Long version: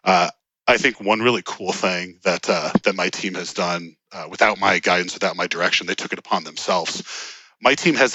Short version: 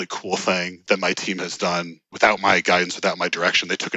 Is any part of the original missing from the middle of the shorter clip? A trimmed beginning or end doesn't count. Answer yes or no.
yes